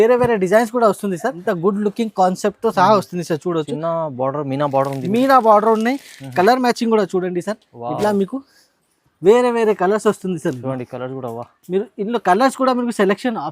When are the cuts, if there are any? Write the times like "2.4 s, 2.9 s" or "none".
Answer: 1.3 s